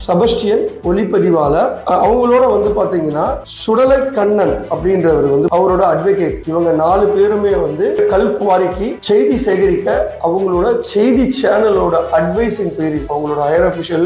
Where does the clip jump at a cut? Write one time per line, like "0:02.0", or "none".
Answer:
0:05.5
0:08.0